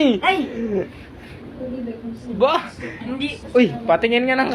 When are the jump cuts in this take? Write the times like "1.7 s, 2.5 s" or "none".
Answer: 3.4 s